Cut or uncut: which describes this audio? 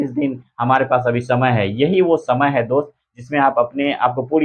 uncut